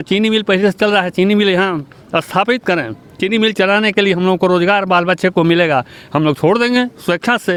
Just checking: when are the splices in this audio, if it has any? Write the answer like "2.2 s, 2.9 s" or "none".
none